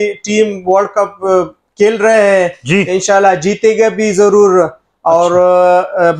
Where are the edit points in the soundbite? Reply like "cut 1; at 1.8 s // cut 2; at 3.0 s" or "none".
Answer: none